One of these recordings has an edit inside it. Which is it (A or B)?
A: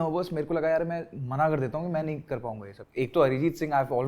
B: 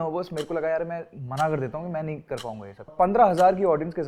B